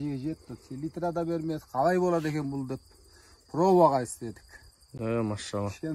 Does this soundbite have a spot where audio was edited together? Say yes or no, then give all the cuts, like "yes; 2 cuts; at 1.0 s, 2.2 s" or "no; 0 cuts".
no; 0 cuts